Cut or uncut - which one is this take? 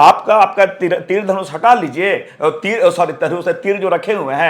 uncut